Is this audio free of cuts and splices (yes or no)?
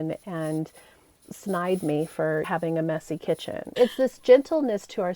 no